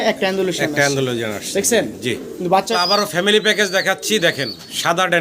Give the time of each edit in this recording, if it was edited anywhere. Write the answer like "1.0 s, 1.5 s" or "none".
2.7 s